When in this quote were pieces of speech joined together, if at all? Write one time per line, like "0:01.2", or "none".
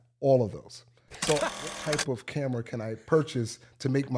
0:01.7